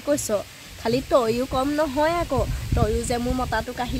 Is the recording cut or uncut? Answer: uncut